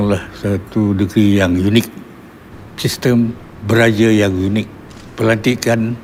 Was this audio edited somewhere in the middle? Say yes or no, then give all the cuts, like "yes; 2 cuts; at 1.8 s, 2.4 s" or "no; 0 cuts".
no; 0 cuts